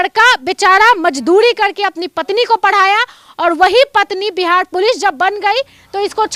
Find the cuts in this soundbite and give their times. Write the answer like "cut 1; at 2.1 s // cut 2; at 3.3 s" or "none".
none